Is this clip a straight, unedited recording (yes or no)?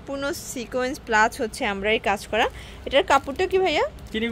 yes